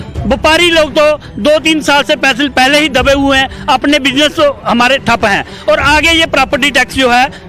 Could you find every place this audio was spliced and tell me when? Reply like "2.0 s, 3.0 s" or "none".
none